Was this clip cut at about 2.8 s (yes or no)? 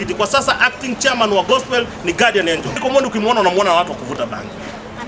yes